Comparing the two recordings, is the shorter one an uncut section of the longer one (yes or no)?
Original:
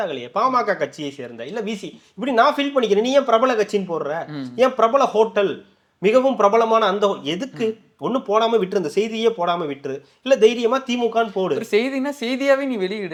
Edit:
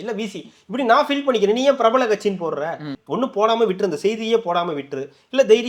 no